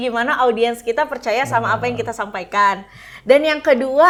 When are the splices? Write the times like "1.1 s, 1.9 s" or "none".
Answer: none